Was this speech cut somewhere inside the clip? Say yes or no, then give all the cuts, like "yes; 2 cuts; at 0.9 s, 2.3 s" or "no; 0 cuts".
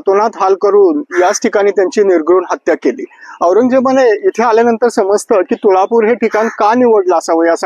no; 0 cuts